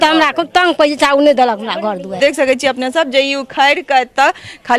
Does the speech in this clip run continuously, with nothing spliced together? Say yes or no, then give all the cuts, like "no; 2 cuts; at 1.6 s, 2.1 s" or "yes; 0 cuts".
no; 1 cut; at 2.1 s